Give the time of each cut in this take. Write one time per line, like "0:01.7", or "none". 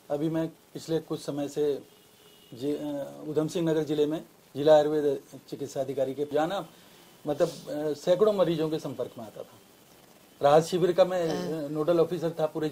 0:06.3